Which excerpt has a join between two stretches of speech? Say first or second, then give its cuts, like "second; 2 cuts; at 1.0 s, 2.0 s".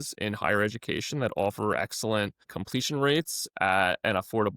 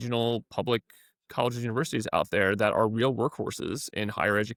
first; 1 cut; at 2.6 s